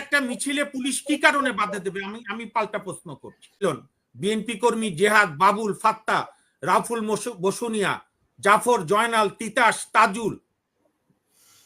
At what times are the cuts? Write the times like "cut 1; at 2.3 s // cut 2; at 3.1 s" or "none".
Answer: cut 1; at 3.6 s